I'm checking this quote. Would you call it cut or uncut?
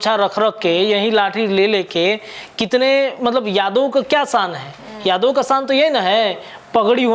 uncut